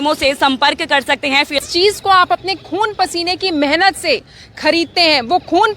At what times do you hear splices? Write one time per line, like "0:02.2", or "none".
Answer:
0:01.6

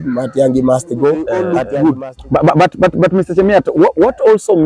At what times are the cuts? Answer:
0:01.6

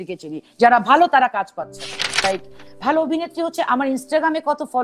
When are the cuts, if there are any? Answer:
0:02.3

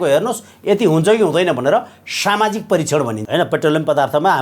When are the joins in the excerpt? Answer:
0:03.2

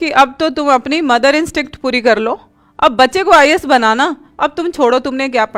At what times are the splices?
none

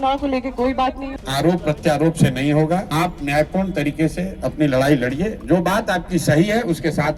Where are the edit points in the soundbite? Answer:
0:01.1
0:02.9

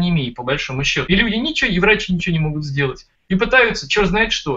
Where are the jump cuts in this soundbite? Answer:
0:01.0

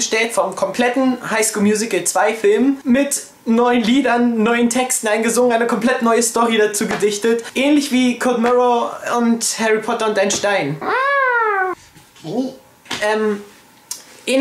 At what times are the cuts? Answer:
none

